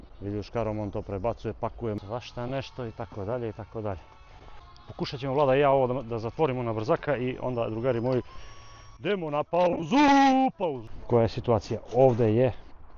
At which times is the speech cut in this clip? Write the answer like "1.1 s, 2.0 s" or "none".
2.0 s, 10.8 s